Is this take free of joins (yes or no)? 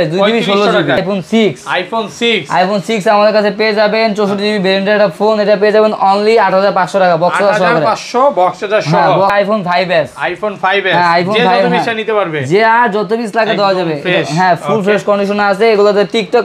no